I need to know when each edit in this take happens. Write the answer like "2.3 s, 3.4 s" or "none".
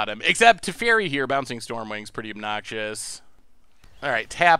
3.6 s